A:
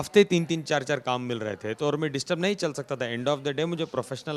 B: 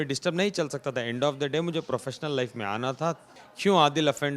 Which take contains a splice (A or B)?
B